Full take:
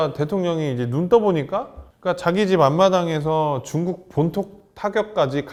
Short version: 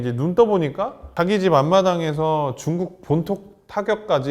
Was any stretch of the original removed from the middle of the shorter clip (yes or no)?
yes